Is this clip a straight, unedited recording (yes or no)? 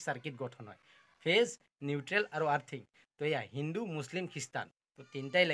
yes